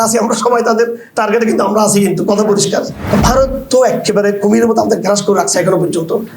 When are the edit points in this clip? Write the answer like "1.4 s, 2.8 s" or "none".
3.0 s